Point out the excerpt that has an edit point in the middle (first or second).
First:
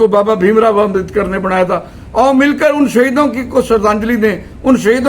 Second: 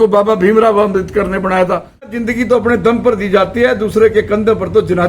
second